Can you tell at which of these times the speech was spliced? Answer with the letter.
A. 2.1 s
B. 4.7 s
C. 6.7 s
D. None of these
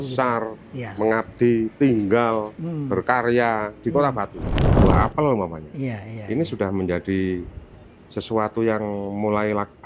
B